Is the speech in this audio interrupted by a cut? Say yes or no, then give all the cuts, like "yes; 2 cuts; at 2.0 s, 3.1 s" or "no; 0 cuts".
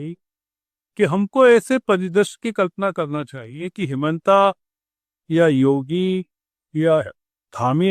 no; 0 cuts